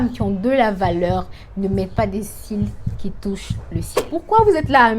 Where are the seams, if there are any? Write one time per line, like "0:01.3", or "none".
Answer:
0:04.0